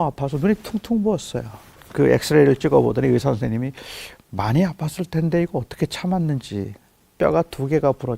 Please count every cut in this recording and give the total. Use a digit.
2